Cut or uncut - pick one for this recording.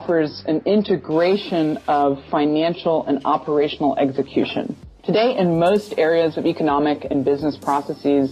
cut